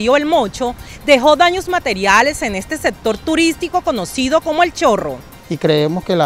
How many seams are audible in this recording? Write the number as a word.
one